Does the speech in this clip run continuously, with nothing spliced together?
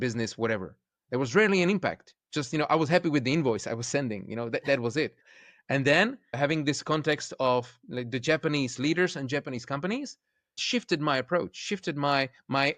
no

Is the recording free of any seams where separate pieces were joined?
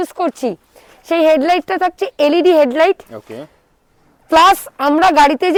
yes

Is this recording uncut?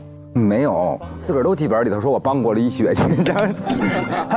no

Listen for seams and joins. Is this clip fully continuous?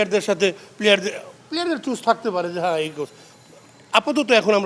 yes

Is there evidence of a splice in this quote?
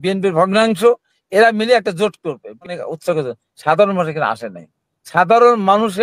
yes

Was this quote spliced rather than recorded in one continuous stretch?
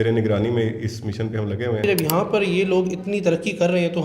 yes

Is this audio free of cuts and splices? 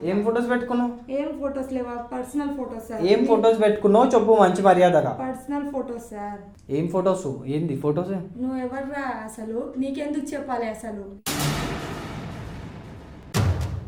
yes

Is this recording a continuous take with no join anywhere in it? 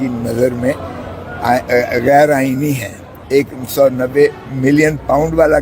no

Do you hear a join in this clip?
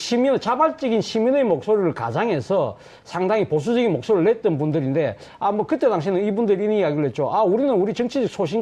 no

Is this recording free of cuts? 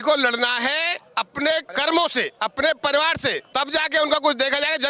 no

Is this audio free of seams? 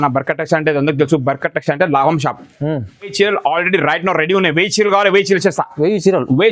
no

